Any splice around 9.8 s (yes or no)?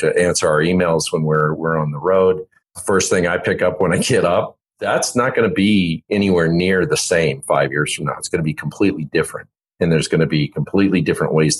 no